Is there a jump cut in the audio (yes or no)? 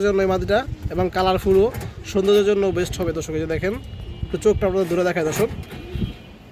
no